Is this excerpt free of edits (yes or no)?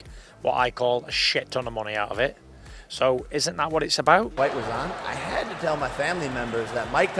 no